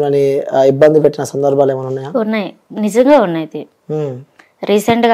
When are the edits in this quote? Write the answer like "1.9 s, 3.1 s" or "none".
none